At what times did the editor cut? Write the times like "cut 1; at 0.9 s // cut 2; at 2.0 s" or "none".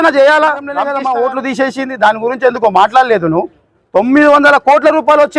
cut 1; at 0.9 s